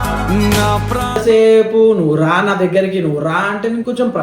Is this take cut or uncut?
cut